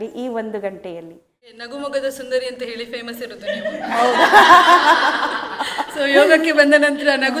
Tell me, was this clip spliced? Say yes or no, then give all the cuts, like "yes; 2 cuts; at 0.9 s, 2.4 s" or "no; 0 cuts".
yes; 1 cut; at 1.6 s